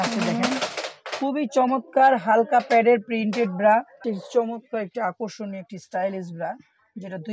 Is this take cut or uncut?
cut